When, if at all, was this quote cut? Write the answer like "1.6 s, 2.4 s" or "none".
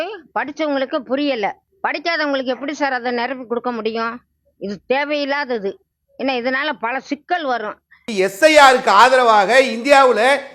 8.0 s